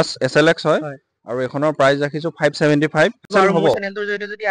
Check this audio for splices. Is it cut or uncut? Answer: cut